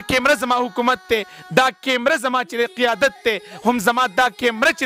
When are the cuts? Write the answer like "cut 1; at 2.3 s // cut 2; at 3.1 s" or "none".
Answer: none